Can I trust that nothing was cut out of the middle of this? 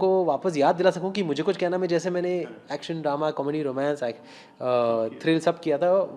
yes; 0 cuts

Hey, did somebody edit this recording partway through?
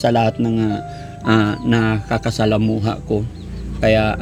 no; 0 cuts

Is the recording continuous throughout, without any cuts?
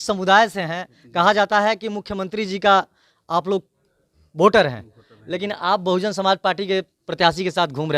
yes; 0 cuts

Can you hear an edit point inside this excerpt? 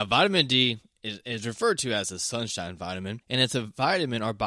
yes; 1 cut; at 3.2 s

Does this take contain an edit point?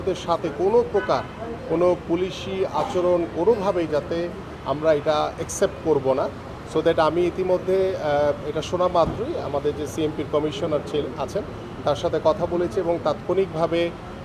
no; 0 cuts

